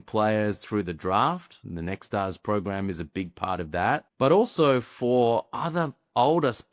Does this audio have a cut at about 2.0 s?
no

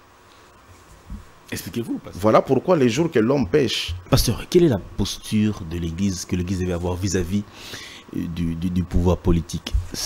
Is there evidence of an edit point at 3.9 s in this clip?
yes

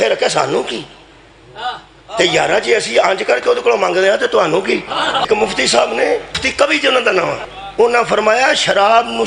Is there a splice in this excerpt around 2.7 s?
no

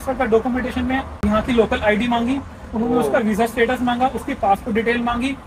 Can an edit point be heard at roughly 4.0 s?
no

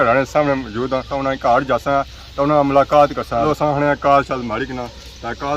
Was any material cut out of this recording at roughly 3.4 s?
yes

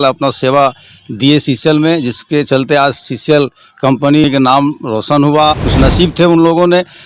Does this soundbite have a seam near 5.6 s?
yes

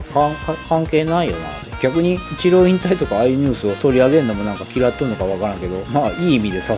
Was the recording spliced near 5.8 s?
yes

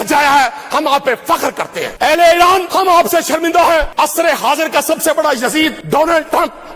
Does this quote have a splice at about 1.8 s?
yes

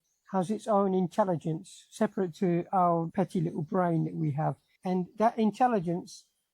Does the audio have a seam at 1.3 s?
no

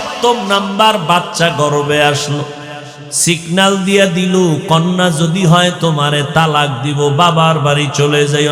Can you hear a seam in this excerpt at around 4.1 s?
no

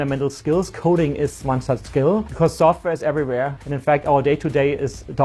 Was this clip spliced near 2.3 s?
yes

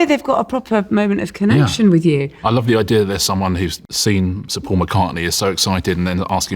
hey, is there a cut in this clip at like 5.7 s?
no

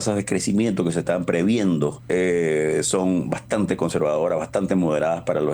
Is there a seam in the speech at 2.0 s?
yes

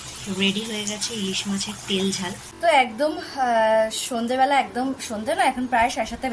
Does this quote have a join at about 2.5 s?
yes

